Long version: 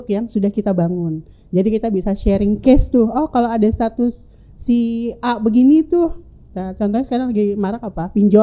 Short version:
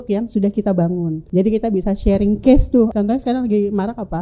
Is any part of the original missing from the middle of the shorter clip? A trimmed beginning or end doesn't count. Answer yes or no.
yes